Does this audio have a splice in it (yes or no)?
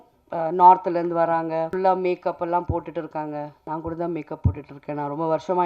yes